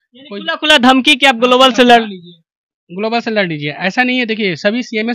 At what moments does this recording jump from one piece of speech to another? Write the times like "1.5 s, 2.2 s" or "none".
none